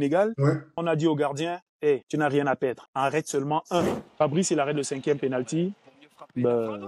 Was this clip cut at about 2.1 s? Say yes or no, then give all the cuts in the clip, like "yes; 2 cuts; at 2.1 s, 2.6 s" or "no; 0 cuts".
yes; 4 cuts; at 0.8 s, 2.1 s, 2.8 s, 4.0 s